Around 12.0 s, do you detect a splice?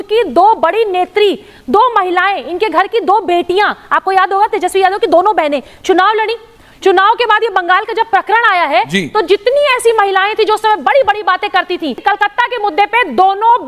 yes; 1 cut; at 12.0 s

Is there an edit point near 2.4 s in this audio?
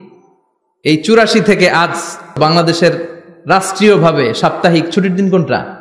yes; 1 cut; at 2.4 s

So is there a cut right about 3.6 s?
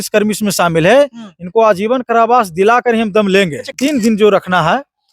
yes; 1 cut; at 3.6 s

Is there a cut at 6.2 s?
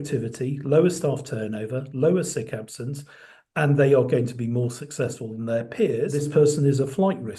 yes; 1 cut; at 6.2 s

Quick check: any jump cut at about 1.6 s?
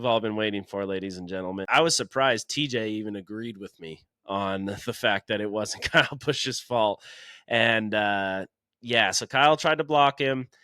yes; 1 cut; at 1.6 s

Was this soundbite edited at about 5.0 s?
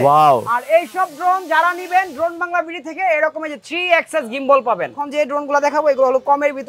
yes; 1 cut; at 5.0 s

